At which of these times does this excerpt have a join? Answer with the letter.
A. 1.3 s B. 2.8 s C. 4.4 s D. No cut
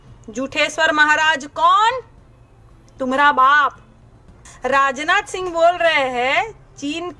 C